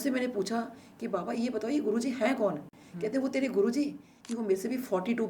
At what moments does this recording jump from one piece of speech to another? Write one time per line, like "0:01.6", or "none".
0:04.1